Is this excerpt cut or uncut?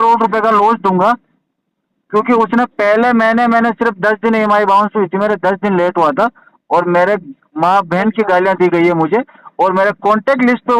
uncut